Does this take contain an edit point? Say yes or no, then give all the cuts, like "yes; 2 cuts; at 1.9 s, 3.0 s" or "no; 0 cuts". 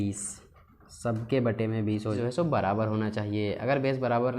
yes; 1 cut; at 2.2 s